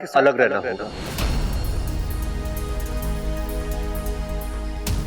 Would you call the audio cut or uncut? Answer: uncut